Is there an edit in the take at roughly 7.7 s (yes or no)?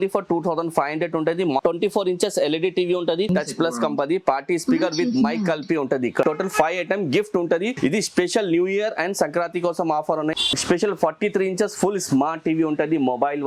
yes